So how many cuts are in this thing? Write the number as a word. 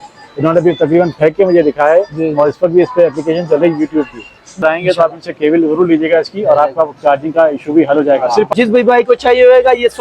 two